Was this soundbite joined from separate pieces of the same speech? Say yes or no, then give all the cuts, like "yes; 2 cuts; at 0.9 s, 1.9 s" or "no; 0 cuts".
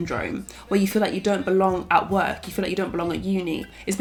no; 0 cuts